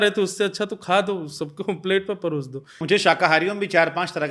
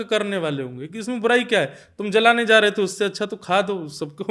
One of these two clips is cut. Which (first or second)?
first